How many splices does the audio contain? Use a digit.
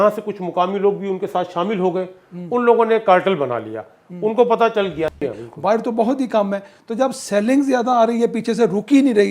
1